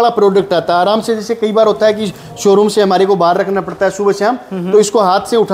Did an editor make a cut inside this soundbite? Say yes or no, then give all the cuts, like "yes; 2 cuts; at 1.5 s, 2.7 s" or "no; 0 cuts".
no; 0 cuts